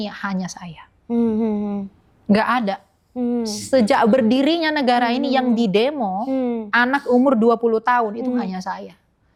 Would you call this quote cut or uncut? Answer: uncut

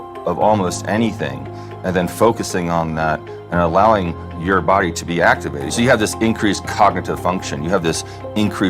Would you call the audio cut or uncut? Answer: cut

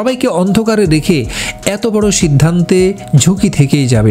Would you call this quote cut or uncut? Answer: uncut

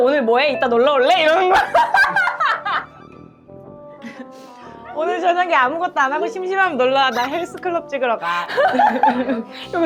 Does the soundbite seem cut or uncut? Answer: uncut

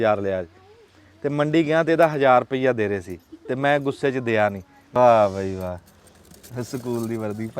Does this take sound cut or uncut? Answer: cut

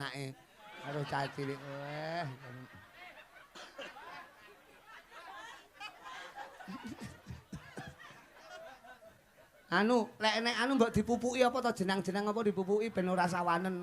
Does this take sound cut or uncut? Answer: uncut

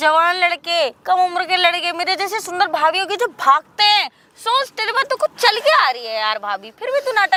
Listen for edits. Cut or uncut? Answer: uncut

